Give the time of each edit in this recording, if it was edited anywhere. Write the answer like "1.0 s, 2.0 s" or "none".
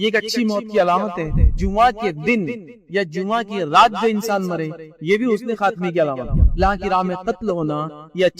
1.6 s, 6.6 s